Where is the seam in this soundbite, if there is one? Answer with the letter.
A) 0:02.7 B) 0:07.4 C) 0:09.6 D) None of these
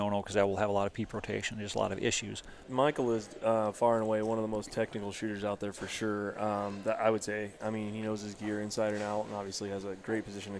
A